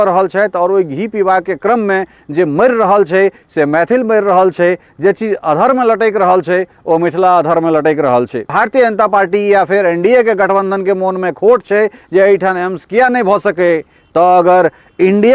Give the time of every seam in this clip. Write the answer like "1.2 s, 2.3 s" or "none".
8.5 s